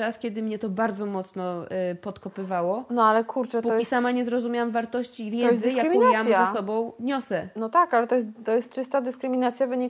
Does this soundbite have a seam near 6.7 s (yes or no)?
no